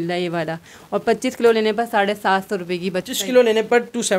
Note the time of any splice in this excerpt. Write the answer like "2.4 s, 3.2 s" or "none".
3.0 s